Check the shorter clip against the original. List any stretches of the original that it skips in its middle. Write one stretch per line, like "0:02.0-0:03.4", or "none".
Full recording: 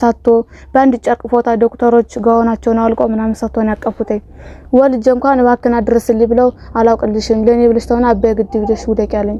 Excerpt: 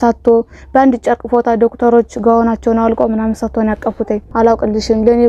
0:04.2-0:06.7